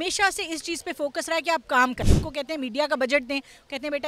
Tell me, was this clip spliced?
yes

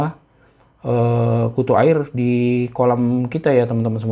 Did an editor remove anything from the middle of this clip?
no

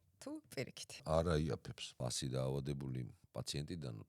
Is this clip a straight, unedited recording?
no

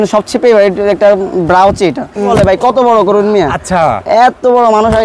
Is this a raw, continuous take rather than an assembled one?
no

